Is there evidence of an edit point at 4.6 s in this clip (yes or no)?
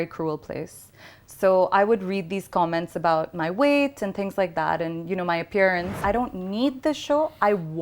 no